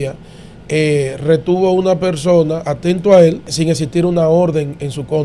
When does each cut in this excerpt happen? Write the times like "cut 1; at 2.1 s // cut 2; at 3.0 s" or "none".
cut 1; at 3.5 s